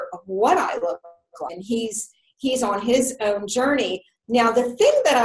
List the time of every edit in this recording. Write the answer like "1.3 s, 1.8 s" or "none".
none